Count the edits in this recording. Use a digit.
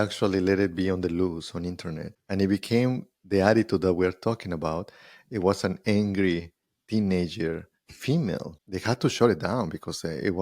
2